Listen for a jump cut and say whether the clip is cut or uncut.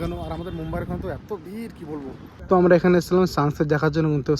cut